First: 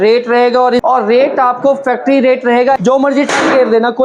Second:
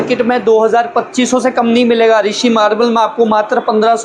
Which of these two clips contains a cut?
first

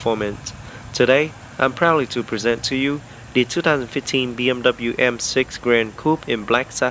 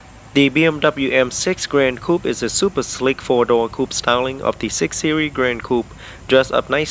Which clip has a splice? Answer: second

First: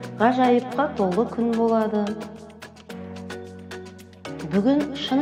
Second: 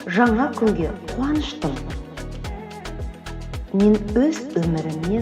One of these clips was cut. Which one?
second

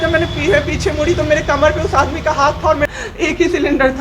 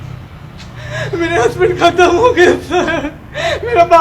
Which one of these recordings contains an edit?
first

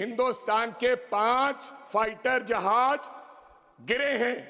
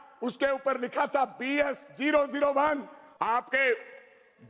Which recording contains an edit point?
second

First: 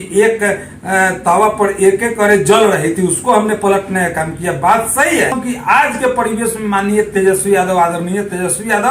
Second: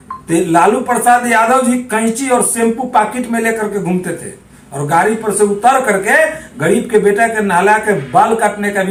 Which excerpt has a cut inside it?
first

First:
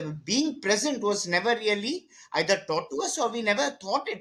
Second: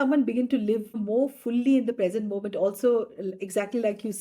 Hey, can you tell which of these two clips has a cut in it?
second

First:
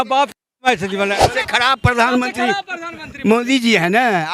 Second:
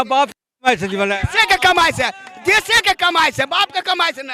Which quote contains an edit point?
first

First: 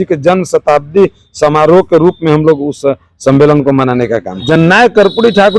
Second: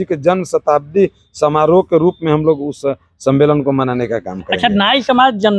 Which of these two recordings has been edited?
first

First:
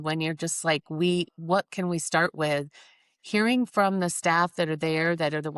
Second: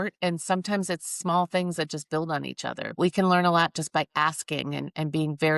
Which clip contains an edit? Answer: second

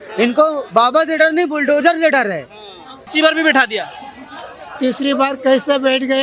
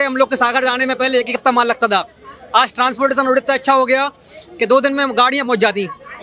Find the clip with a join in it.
first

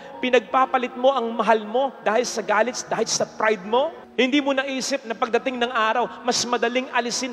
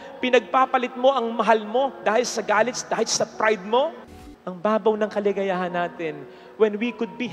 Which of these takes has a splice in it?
second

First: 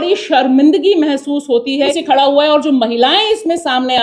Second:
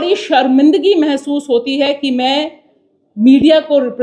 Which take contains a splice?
first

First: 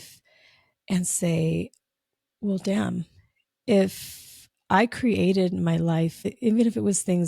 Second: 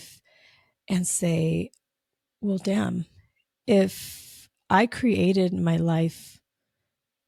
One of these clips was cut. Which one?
first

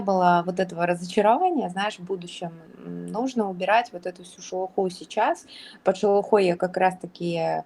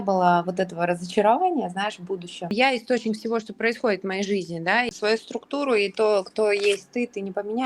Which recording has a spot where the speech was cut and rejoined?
second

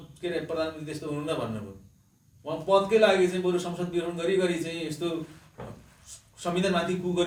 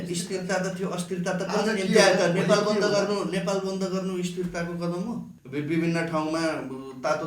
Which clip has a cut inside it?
second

